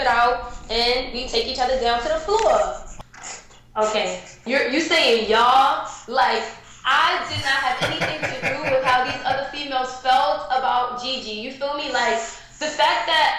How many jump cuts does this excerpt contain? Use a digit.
1